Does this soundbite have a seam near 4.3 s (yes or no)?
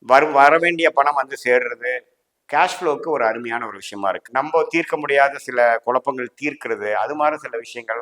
yes